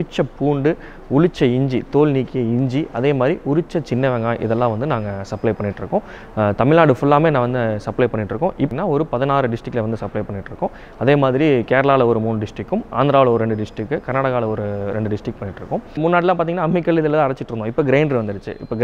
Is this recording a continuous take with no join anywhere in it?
no; 2 cuts; at 8.7 s, 16.0 s

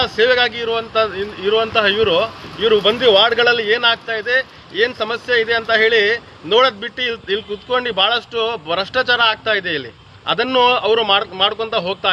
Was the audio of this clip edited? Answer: no; 0 cuts

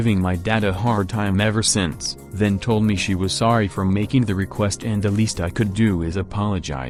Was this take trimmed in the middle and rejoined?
no; 0 cuts

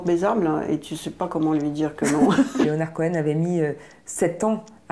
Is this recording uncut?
no; 1 cut; at 2.6 s

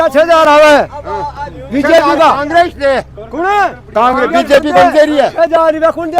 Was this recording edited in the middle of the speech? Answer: no; 0 cuts

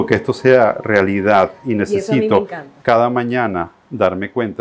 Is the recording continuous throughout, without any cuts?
yes; 0 cuts

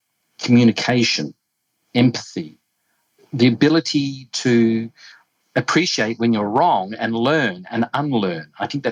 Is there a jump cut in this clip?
no; 0 cuts

